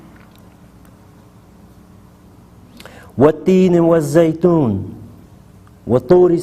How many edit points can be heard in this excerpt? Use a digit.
1